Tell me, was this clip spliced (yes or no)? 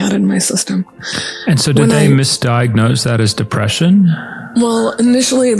no